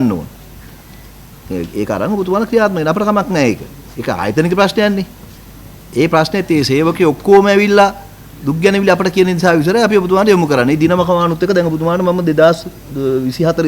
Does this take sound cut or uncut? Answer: uncut